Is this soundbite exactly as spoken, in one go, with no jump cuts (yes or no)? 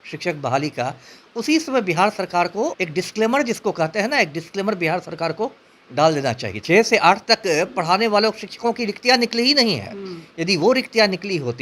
no